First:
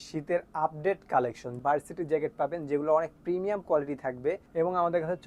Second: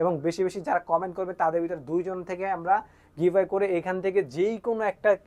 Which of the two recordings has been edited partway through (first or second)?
first